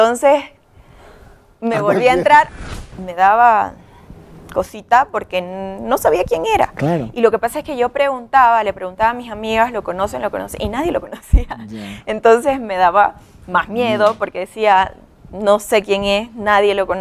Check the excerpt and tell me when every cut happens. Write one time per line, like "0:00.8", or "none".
0:02.5